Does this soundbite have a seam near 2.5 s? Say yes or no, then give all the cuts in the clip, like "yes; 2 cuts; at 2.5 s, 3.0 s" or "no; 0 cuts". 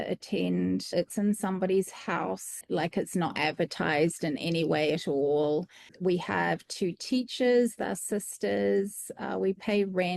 yes; 3 cuts; at 0.9 s, 2.5 s, 5.9 s